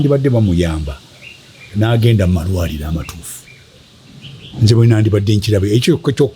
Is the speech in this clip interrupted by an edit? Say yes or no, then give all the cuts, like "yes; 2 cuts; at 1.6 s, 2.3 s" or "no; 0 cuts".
no; 0 cuts